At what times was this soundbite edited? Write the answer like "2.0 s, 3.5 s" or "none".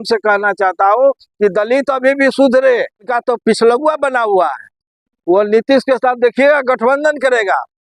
3.1 s